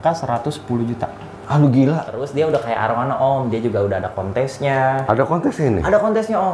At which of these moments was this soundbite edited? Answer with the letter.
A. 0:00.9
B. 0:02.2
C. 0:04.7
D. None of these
B